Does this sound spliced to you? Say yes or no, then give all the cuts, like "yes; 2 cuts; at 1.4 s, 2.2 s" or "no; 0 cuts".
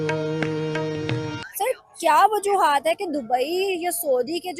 yes; 1 cut; at 1.5 s